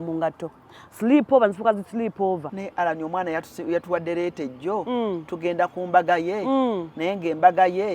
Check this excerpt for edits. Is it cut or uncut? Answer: cut